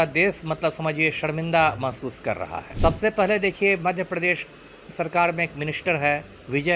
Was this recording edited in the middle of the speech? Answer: yes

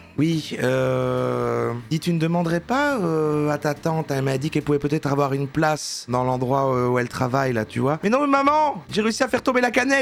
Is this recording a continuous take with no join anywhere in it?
yes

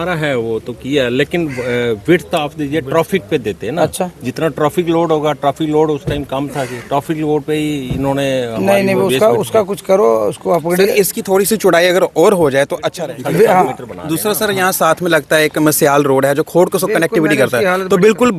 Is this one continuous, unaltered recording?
no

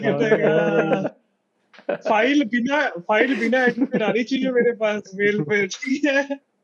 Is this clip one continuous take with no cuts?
yes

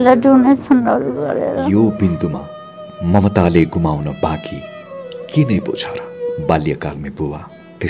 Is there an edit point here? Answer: no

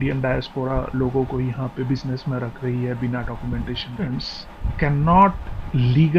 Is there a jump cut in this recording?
yes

